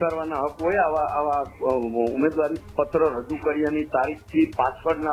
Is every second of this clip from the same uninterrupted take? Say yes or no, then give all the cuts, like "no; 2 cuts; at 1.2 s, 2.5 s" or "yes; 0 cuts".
yes; 0 cuts